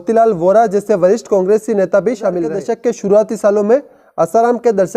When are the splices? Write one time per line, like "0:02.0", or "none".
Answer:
0:02.6